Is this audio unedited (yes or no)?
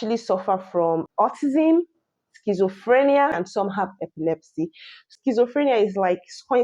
yes